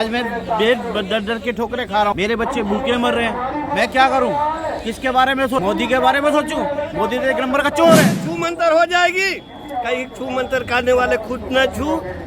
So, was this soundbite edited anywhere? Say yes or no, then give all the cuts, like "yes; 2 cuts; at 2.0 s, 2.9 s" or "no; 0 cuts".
yes; 3 cuts; at 2.2 s, 5.6 s, 8.2 s